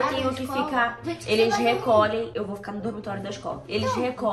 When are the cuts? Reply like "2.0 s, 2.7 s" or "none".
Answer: 1.1 s